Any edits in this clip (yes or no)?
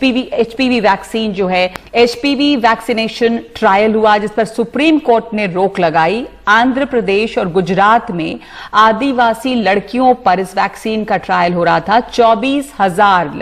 yes